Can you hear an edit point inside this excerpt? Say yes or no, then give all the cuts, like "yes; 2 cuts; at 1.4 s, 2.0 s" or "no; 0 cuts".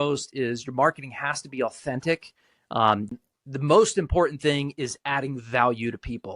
yes; 1 cut; at 3.1 s